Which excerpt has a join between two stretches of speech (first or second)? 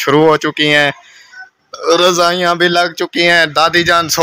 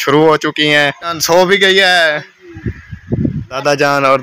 second